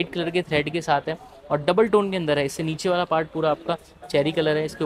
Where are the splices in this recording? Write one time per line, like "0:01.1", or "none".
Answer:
none